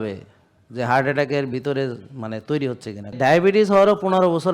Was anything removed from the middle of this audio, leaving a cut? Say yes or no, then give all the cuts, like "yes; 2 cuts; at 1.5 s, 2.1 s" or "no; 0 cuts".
yes; 1 cut; at 3.1 s